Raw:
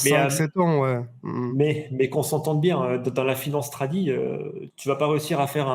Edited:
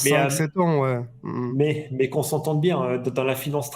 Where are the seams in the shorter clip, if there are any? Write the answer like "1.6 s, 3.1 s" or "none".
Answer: none